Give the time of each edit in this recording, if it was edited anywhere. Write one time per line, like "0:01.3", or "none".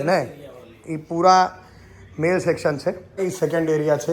0:03.2